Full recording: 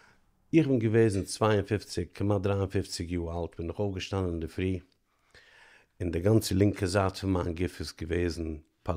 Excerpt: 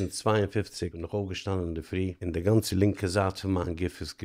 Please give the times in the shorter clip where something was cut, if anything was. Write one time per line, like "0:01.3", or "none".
0:01.0
0:02.2